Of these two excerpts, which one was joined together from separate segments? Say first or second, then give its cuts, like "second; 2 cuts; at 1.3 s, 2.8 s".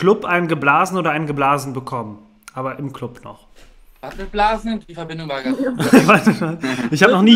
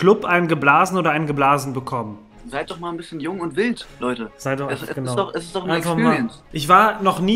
second; 2 cuts; at 2.4 s, 6.4 s